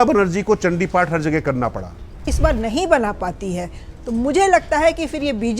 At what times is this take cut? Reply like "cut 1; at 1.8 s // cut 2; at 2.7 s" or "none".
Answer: cut 1; at 2.3 s